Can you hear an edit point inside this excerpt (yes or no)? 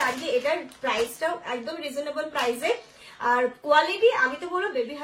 no